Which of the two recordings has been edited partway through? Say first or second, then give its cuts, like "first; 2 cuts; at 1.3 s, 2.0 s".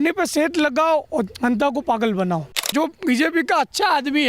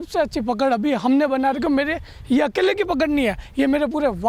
first; 1 cut; at 2.7 s